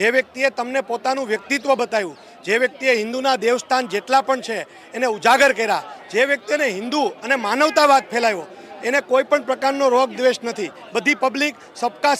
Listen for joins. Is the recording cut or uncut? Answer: uncut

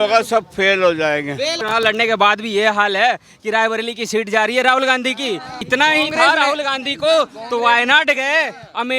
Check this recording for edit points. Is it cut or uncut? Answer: cut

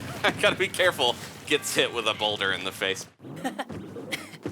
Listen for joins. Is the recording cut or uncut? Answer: cut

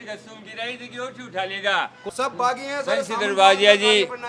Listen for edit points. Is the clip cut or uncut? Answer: cut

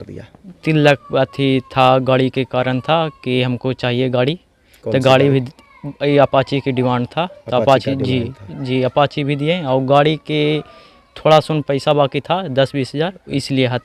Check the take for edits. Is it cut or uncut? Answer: uncut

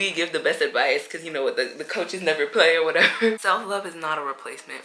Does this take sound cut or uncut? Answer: cut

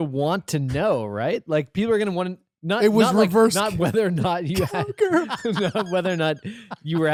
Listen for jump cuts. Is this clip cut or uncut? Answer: uncut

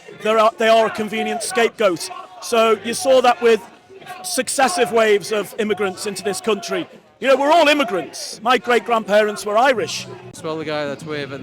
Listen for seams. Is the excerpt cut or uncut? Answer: cut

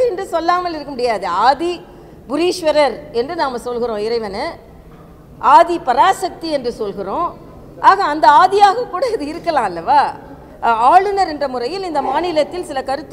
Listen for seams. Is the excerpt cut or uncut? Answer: cut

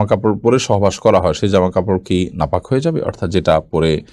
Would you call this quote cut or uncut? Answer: uncut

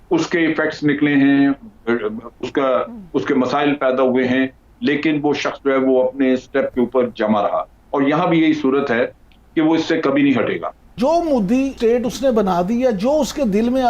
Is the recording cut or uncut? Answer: cut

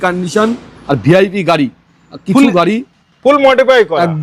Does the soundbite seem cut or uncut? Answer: uncut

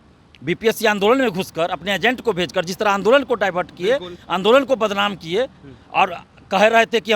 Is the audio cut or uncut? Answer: uncut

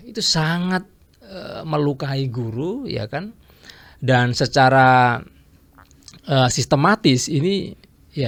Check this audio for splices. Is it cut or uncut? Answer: uncut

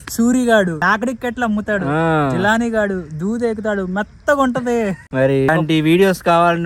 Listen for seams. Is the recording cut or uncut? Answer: cut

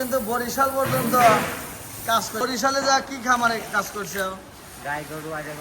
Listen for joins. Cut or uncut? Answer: cut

